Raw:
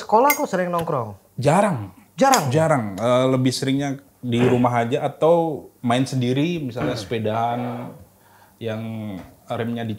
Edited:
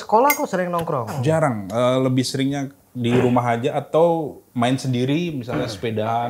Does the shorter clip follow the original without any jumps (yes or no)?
no